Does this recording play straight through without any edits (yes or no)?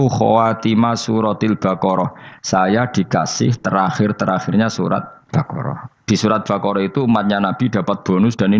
no